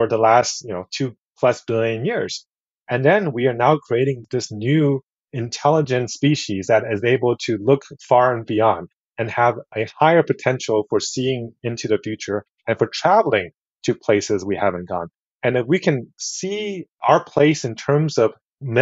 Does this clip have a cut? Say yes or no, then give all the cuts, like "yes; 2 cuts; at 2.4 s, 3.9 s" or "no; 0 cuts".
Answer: yes; 1 cut; at 16.5 s